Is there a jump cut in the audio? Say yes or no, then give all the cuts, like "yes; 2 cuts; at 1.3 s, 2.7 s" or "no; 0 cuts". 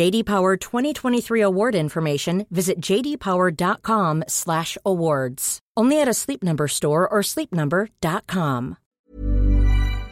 yes; 1 cut; at 8.9 s